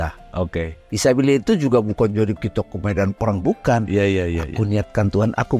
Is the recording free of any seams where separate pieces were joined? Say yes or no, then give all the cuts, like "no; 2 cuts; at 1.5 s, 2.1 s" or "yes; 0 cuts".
yes; 0 cuts